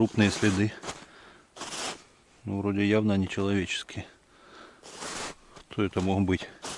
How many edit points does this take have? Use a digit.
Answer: 0